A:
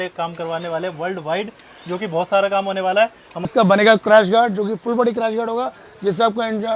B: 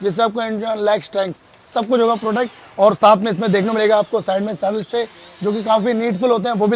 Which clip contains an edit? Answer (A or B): A